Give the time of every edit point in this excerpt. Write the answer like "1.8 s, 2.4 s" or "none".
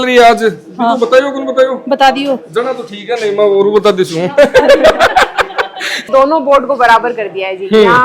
6.0 s